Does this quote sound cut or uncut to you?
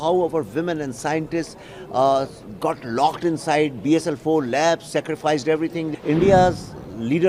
cut